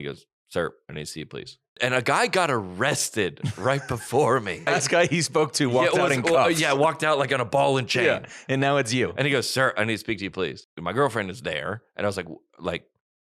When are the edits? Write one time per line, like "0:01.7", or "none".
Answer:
0:01.7
0:04.7
0:10.7